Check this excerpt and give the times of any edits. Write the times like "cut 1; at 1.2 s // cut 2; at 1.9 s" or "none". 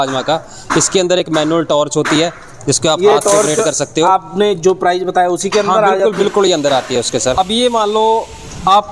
cut 1; at 7.2 s